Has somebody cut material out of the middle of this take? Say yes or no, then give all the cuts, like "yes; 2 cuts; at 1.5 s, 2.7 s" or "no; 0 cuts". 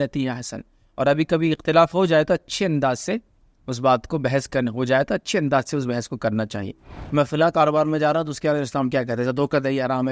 yes; 1 cut; at 6.9 s